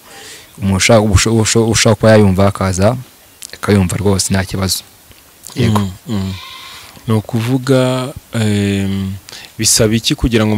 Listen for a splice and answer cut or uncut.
uncut